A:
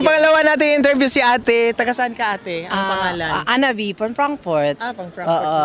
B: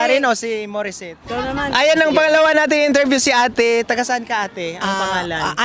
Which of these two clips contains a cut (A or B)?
B